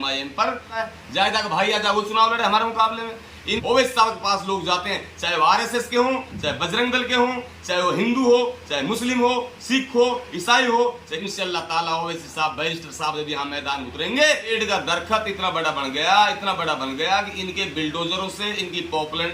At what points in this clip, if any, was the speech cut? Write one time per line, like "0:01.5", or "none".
0:00.8
0:03.5
0:11.2
0:14.5